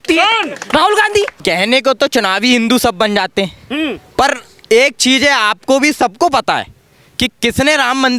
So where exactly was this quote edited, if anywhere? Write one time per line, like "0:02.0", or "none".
0:01.4